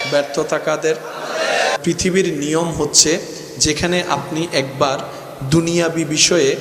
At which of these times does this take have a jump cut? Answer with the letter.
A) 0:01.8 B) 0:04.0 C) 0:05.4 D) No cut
A